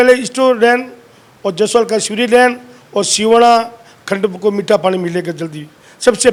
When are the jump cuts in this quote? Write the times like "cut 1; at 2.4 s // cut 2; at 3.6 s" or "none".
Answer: none